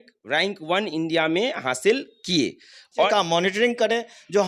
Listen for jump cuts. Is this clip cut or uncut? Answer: cut